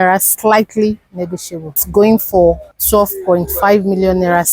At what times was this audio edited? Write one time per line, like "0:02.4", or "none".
0:01.7